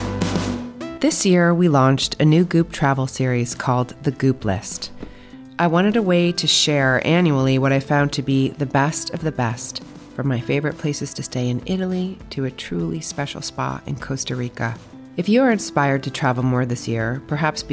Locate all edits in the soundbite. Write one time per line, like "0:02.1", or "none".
0:00.9